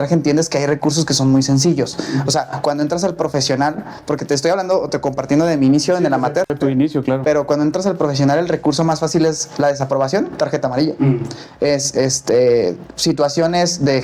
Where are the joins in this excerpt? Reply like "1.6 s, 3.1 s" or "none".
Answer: none